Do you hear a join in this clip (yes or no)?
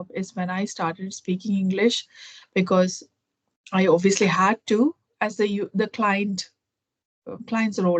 no